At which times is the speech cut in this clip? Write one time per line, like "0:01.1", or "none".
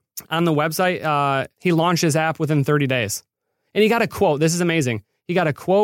0:01.6